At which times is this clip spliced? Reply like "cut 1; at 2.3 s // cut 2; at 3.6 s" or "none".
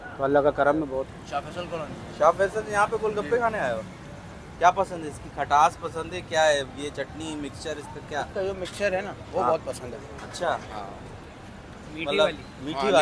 cut 1; at 1.2 s